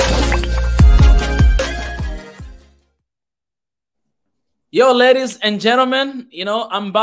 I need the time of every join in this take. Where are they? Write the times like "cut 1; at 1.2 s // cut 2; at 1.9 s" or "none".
none

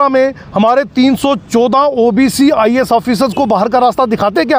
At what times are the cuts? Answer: none

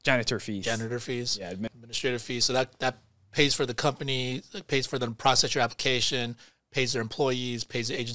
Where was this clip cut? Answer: cut 1; at 1.7 s

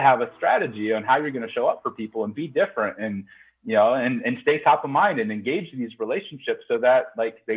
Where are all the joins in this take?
none

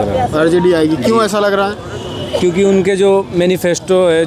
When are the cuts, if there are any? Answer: none

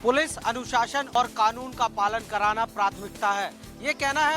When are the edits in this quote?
cut 1; at 1.1 s

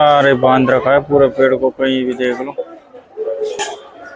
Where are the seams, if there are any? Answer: none

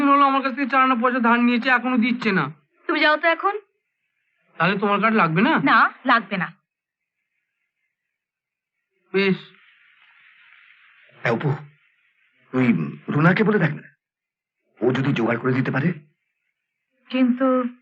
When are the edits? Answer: none

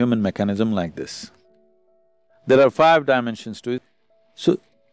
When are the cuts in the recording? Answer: cut 1; at 3.7 s

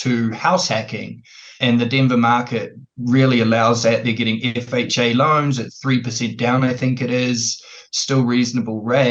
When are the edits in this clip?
cut 1; at 1.5 s

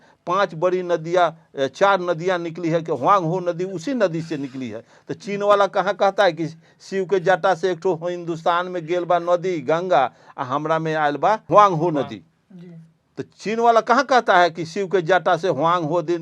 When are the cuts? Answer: cut 1; at 11.5 s

